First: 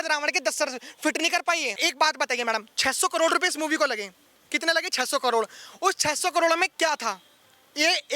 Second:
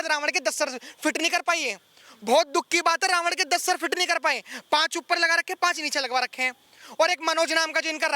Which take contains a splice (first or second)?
first